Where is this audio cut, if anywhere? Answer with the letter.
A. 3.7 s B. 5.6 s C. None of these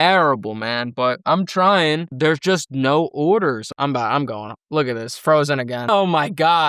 A